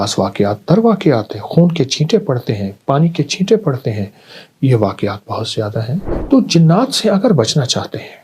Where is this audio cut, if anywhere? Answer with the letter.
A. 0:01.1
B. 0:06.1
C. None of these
B